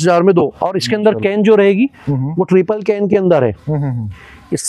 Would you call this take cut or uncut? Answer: uncut